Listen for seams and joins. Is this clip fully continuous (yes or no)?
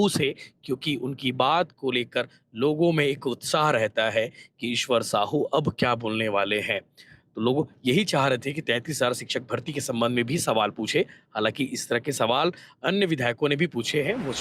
yes